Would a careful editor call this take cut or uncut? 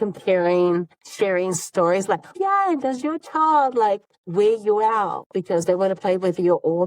cut